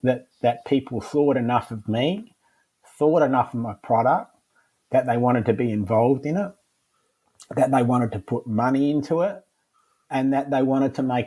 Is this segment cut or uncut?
uncut